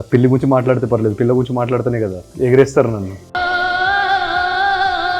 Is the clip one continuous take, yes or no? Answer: no